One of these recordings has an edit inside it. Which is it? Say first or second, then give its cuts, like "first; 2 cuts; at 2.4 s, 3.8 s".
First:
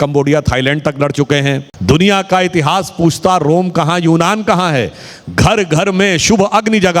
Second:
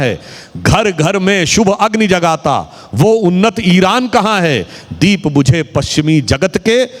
first; 1 cut; at 1.7 s